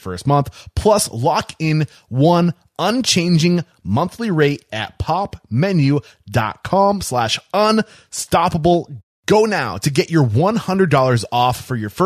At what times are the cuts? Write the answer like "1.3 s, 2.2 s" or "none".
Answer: none